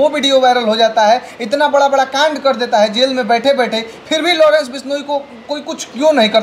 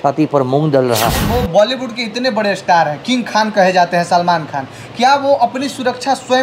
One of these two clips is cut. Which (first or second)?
second